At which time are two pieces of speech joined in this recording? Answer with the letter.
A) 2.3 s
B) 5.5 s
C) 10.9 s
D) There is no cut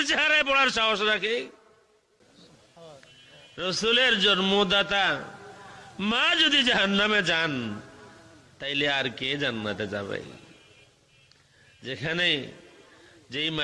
A